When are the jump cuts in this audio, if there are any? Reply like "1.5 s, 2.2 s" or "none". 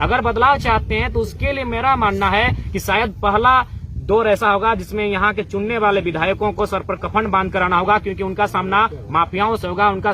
none

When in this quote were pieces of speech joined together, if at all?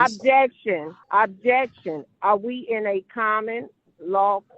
0.9 s

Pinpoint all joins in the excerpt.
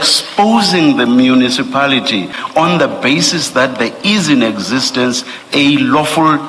2.4 s

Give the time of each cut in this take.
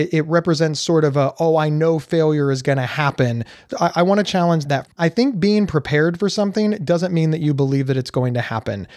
3.7 s, 5.0 s

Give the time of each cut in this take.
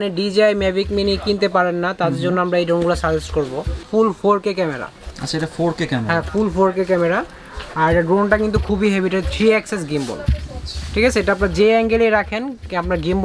3.8 s

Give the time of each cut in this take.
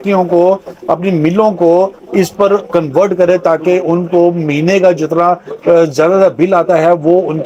none

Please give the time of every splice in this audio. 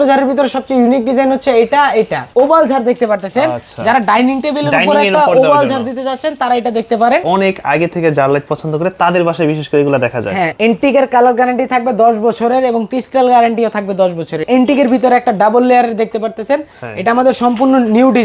2.2 s, 7.2 s, 10.5 s, 14.4 s

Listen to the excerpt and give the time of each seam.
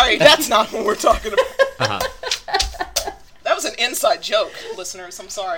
3.3 s

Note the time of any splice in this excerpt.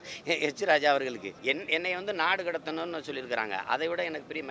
1.3 s

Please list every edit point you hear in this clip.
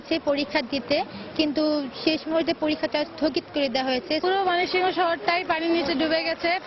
4.2 s

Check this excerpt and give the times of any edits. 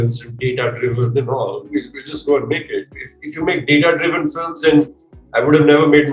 none

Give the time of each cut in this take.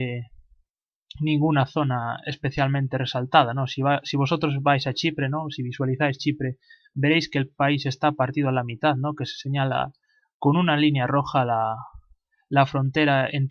3.9 s

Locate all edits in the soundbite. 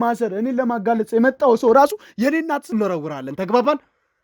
2.6 s

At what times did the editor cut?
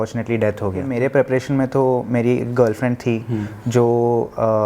0.9 s

